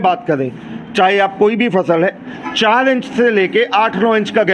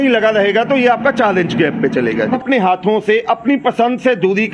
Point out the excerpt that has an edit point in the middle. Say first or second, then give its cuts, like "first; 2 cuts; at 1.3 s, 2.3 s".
second; 1 cut; at 2.4 s